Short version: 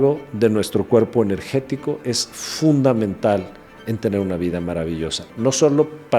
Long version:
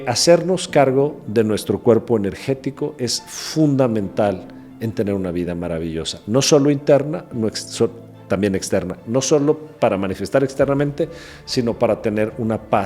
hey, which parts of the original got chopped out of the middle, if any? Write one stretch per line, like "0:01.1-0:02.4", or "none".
0:06.2-0:08.9